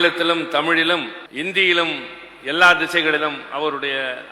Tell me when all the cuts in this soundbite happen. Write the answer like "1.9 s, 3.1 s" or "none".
1.2 s